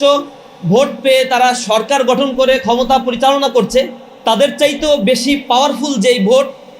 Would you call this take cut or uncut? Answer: uncut